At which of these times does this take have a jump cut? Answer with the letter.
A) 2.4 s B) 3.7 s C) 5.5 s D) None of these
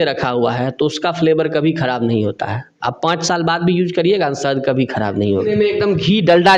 C